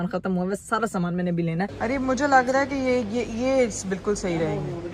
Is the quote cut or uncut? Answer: cut